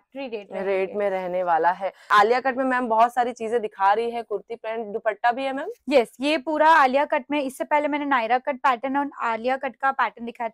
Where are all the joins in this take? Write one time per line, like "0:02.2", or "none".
0:02.1